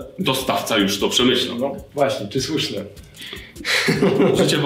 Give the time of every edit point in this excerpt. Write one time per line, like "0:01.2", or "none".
none

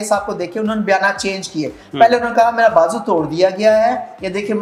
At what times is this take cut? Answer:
none

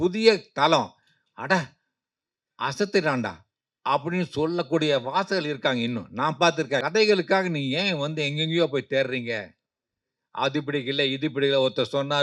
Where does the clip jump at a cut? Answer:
0:06.8

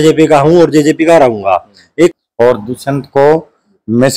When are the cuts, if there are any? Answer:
0:02.1

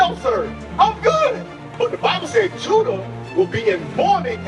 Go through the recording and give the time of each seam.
0:01.7

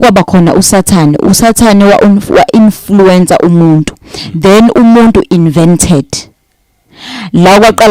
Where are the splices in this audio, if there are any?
none

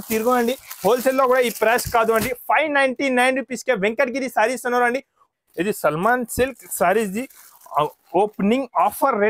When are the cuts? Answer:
0:05.3

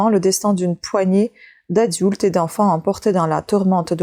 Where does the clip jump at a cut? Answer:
none

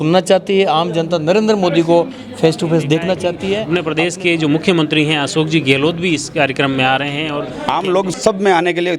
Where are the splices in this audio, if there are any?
0:03.6
0:07.9

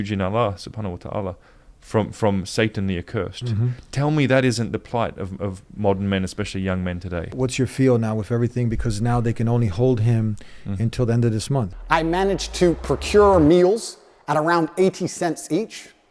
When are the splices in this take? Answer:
0:07.2
0:11.8

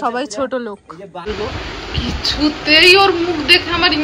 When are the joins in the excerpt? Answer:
0:01.3

